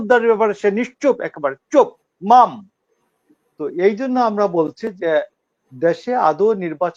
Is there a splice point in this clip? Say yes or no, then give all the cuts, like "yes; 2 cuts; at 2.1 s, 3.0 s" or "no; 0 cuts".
no; 0 cuts